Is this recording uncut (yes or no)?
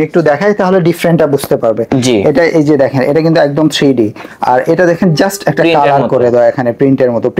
yes